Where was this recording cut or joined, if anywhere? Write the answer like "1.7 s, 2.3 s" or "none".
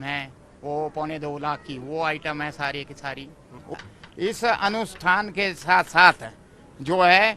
3.8 s